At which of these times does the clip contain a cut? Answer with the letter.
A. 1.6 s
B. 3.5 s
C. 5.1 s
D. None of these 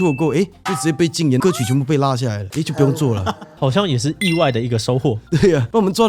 D